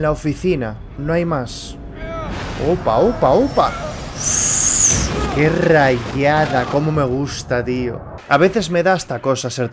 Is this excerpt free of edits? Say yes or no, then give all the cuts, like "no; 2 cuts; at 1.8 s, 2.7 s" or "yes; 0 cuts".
no; 1 cut; at 8.1 s